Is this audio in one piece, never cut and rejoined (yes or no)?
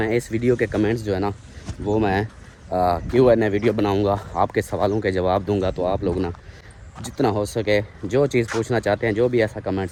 yes